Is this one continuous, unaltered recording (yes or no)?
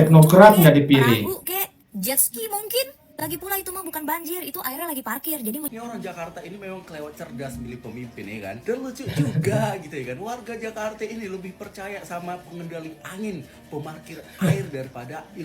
no